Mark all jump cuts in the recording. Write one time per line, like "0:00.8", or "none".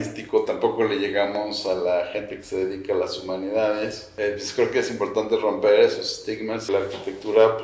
0:04.1
0:06.7